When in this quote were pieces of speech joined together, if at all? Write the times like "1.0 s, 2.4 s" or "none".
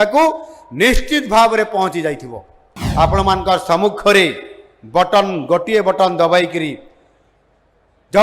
2.7 s